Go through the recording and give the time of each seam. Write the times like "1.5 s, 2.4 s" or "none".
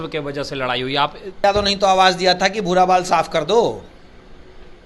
1.4 s